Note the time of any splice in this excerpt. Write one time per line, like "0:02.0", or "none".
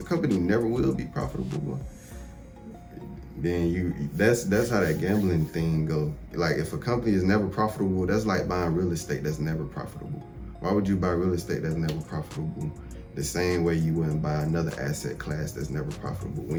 none